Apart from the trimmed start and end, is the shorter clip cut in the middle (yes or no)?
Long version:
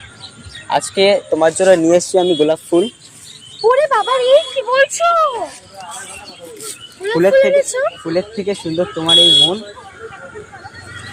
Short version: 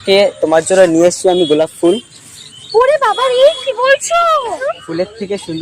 yes